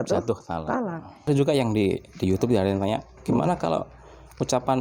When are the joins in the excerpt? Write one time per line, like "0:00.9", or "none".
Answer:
0:01.3